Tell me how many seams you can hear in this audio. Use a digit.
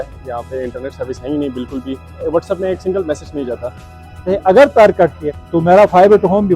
2